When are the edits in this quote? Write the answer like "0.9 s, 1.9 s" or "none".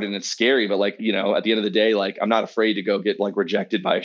1.0 s